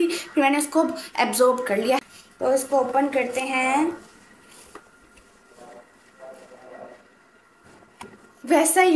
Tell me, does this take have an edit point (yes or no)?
yes